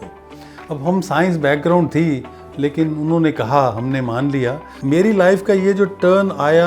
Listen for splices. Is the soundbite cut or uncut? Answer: cut